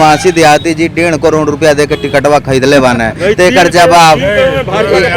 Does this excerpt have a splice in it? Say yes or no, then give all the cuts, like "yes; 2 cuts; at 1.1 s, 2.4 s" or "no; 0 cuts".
no; 0 cuts